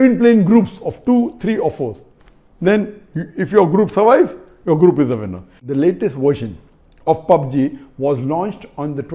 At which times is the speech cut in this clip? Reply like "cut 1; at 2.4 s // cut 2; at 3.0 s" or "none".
cut 1; at 5.6 s